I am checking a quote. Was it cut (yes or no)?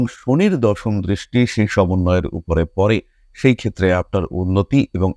no